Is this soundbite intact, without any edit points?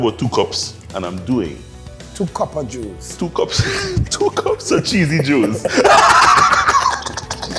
yes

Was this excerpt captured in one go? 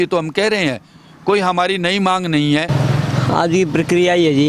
yes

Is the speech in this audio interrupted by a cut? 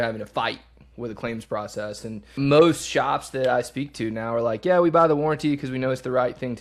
yes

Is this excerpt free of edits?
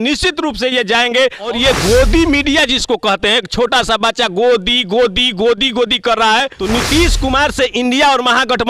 no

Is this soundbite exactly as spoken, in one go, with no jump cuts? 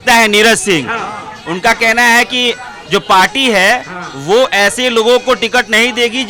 yes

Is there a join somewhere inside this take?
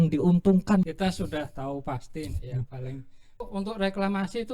yes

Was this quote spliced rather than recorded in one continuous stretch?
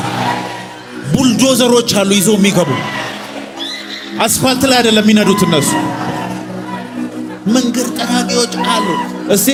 no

